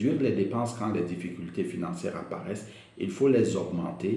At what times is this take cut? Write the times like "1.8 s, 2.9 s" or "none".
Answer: none